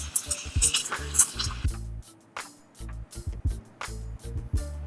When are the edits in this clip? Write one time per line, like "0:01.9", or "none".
none